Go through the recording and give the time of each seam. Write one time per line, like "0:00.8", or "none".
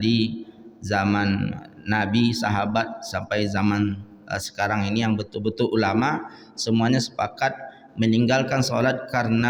none